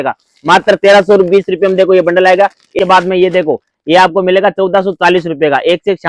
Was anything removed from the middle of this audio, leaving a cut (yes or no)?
yes